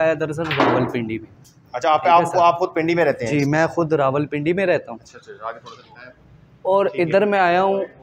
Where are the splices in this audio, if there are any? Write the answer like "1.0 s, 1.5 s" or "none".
none